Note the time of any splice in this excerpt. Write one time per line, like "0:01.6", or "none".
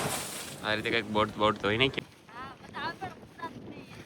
0:01.9